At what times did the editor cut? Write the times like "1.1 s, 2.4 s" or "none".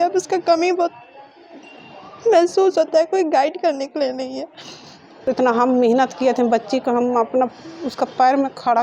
5.1 s